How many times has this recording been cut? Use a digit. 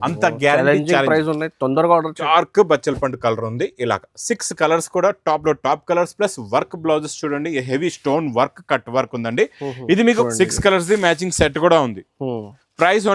2